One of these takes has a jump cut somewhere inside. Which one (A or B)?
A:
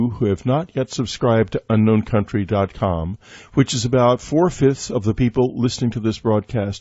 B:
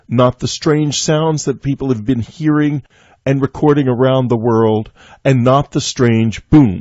B